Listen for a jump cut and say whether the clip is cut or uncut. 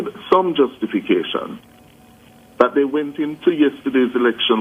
uncut